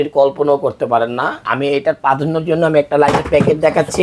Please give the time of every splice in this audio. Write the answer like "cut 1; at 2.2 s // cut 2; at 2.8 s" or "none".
cut 1; at 1.4 s